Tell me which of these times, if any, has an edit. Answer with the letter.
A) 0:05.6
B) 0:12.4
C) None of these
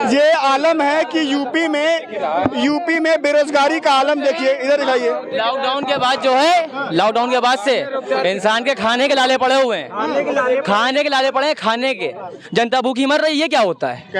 B